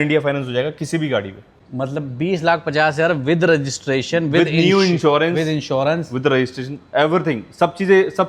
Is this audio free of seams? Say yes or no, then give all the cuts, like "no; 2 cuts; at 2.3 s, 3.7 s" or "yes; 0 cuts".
no; 1 cut; at 1.4 s